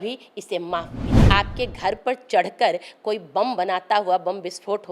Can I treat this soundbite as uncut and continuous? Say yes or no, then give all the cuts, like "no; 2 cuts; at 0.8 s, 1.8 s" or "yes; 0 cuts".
no; 1 cut; at 1.1 s